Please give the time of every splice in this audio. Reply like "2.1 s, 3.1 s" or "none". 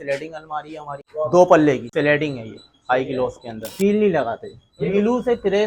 1.0 s, 1.9 s, 3.7 s, 4.9 s